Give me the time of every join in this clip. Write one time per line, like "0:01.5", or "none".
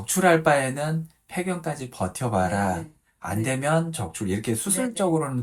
none